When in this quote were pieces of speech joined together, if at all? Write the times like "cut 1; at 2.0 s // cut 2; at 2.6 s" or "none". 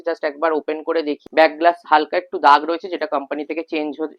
cut 1; at 1.2 s